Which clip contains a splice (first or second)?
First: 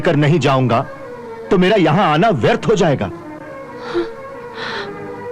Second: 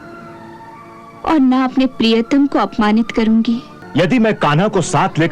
second